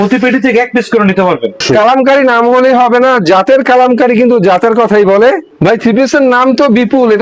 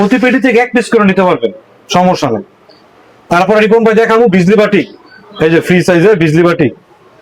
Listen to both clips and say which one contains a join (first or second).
first